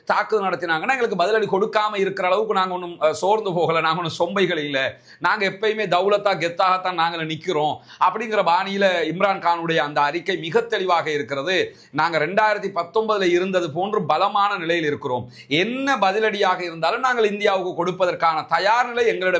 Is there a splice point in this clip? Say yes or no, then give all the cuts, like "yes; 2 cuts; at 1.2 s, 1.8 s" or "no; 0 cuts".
no; 0 cuts